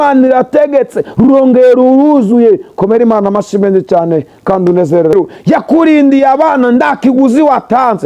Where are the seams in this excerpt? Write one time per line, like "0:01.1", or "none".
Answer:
0:05.1